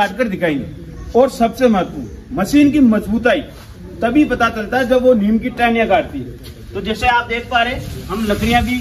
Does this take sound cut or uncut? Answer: uncut